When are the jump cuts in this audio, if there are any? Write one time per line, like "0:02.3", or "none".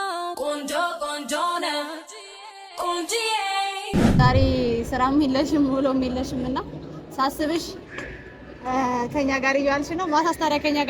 0:04.2